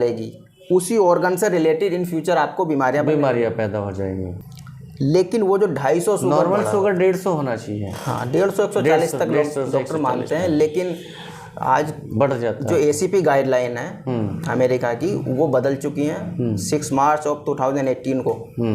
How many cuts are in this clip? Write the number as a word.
one